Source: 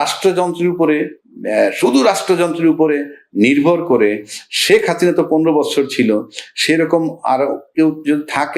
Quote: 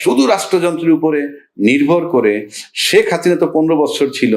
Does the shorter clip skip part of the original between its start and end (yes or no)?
no